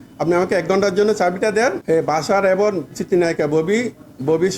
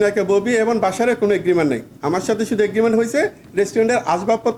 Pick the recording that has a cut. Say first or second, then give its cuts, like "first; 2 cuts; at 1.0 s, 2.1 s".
first; 1 cut; at 1.8 s